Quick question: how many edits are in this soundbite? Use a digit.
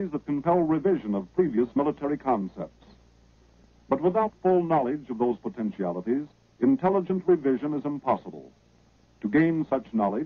1